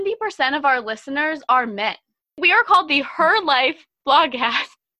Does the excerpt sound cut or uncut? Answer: cut